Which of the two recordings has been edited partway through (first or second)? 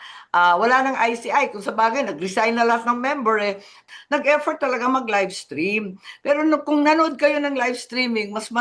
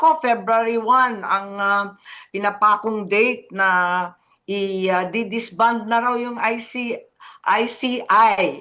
first